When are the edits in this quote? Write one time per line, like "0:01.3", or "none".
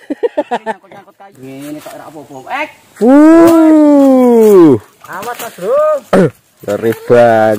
0:01.3